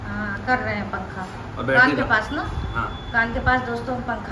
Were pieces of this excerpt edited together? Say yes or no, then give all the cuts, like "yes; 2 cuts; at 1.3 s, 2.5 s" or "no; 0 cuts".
no; 0 cuts